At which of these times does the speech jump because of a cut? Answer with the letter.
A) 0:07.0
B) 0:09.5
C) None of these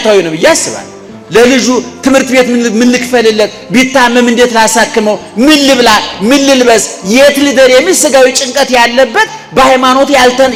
C